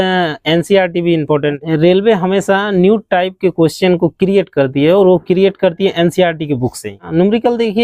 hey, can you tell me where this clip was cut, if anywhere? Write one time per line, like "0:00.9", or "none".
0:01.6
0:07.0